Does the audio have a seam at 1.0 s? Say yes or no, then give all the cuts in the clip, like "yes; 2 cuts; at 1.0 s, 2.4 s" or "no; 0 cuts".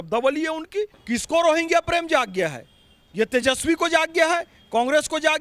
yes; 1 cut; at 1.0 s